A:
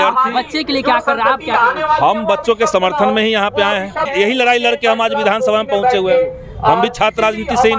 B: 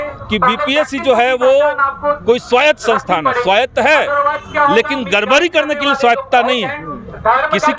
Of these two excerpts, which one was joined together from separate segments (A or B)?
A